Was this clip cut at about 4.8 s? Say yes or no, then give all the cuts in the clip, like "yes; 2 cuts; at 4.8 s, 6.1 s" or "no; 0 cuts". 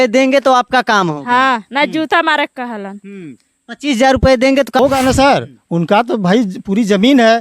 yes; 1 cut; at 4.8 s